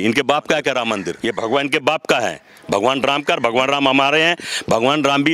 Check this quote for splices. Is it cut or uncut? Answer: cut